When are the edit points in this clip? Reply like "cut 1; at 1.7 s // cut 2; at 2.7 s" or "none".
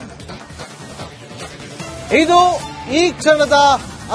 cut 1; at 1.5 s